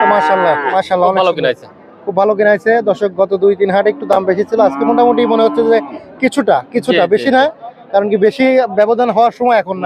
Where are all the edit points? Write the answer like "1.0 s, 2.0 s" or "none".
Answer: none